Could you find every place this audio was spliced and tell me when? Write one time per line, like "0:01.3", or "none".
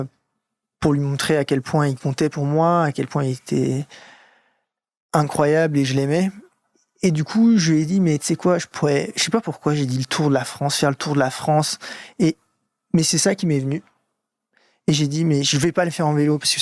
0:06.5